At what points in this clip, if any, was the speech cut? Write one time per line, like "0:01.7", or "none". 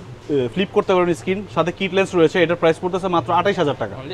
none